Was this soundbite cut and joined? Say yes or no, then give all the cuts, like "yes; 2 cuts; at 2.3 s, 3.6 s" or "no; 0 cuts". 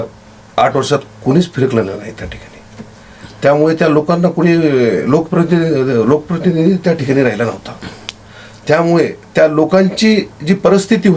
no; 0 cuts